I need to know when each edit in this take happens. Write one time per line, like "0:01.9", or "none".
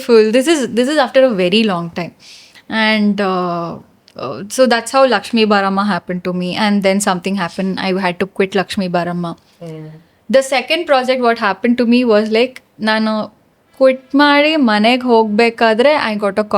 none